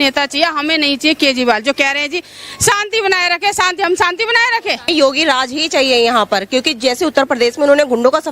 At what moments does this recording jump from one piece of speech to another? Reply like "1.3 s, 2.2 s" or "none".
4.9 s